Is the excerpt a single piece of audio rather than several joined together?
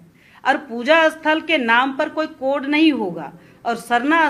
yes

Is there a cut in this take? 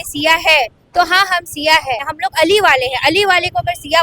yes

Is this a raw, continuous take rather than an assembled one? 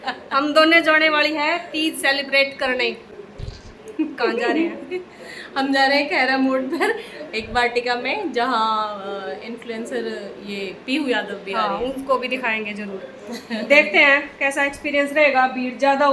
yes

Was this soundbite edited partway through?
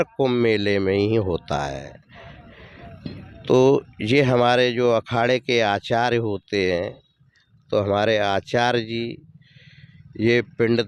no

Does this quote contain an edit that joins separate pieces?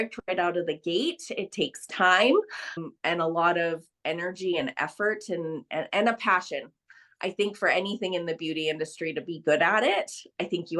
no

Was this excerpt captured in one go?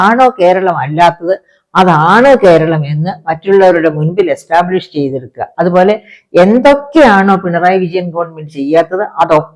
yes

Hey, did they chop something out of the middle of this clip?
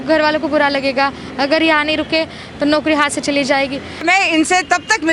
yes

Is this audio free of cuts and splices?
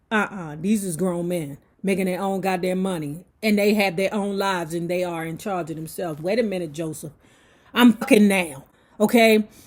yes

